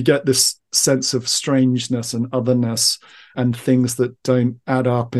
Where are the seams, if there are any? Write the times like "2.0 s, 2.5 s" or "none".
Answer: 3.3 s